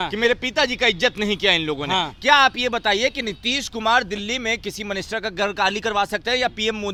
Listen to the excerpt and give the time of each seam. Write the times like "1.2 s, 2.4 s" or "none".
none